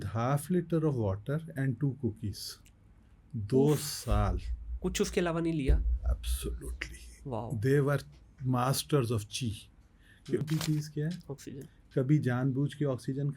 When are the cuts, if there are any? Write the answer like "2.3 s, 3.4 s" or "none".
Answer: 10.5 s